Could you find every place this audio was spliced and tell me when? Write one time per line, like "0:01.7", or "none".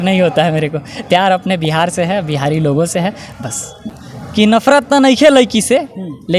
0:04.0

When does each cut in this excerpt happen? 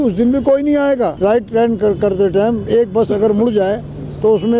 0:01.1

